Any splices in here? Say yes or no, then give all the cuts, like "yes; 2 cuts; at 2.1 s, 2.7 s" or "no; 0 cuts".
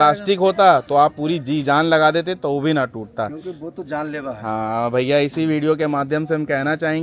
no; 0 cuts